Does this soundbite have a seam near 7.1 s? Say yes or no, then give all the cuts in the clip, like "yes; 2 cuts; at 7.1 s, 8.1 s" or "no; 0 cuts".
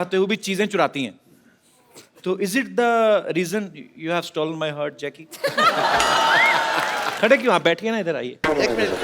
yes; 1 cut; at 7.1 s